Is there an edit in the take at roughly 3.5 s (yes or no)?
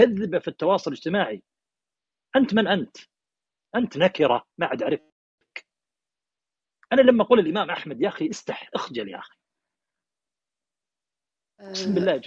no